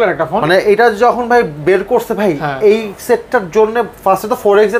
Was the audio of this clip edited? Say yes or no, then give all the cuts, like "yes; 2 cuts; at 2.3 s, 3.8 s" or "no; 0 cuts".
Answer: no; 0 cuts